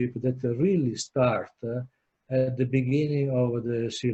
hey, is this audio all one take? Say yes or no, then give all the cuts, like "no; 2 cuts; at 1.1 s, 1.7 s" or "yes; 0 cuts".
yes; 0 cuts